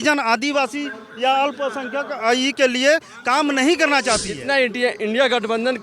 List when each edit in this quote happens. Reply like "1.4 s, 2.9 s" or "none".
4.3 s